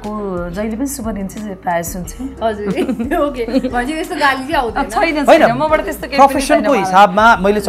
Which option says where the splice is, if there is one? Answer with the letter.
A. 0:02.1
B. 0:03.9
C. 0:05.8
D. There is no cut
D